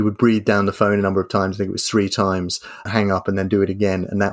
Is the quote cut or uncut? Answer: cut